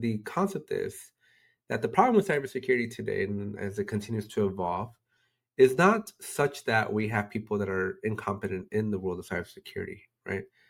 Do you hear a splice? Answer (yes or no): no